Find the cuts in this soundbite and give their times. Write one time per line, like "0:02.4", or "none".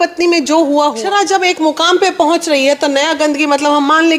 0:01.0